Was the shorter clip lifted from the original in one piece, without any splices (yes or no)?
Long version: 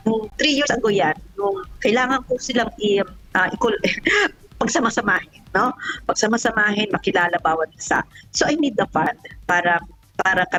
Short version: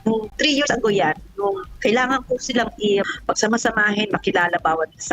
no